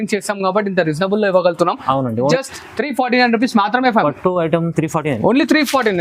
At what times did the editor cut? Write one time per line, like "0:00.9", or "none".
0:02.3